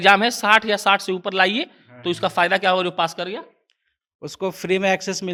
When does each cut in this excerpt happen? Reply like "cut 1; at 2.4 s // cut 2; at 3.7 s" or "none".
none